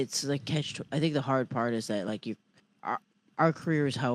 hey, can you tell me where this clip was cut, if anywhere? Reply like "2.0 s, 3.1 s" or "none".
none